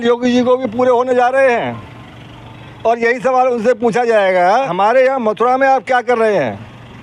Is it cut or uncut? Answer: cut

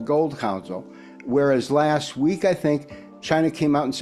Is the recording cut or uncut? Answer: uncut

